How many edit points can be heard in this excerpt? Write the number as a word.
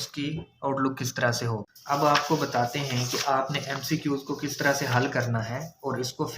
one